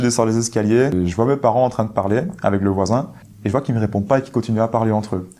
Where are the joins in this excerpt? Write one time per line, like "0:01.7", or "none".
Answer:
0:00.9
0:03.3